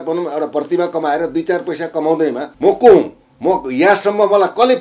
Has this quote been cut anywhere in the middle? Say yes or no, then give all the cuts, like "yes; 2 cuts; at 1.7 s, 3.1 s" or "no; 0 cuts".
yes; 1 cut; at 2.5 s